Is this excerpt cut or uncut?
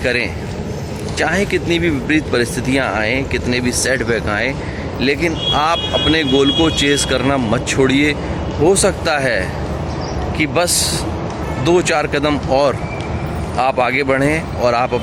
uncut